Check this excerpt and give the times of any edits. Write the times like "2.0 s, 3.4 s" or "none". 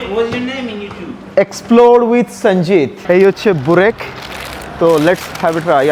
3.0 s